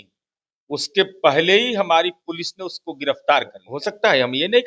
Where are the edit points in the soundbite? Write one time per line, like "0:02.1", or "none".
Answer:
0:03.6